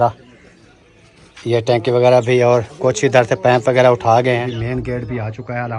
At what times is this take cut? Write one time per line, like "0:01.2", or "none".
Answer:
0:04.4